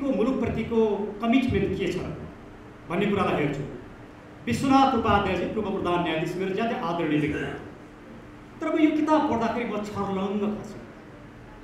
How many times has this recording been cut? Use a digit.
0